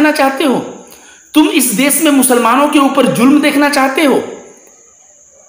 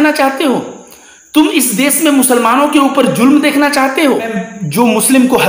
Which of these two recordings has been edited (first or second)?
second